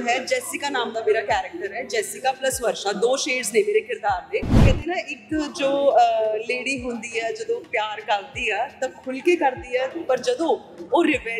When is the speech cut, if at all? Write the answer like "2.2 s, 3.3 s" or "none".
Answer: 4.6 s